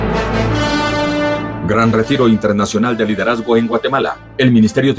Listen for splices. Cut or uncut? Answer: uncut